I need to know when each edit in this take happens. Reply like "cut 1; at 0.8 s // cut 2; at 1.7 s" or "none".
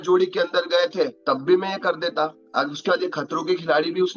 cut 1; at 1.2 s // cut 2; at 2.4 s